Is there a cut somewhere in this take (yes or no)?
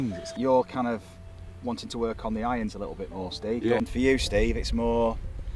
yes